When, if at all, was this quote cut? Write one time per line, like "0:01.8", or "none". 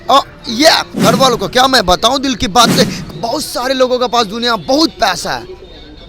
0:00.9
0:03.0